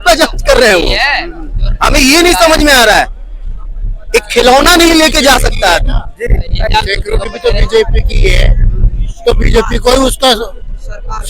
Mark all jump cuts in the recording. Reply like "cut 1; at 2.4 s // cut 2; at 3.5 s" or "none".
none